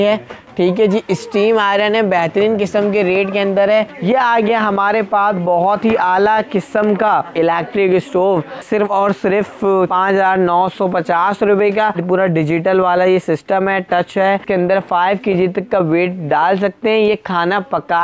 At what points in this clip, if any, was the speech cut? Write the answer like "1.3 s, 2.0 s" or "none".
3.9 s, 7.3 s, 8.6 s, 9.9 s, 12.0 s, 14.4 s